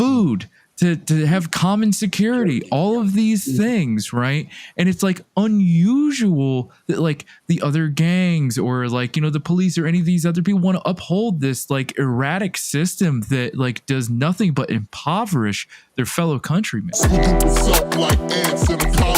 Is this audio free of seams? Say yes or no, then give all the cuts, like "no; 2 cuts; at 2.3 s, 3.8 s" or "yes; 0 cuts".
no; 1 cut; at 16.9 s